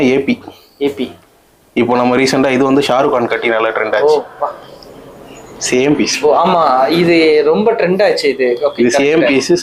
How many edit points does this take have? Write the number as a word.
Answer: zero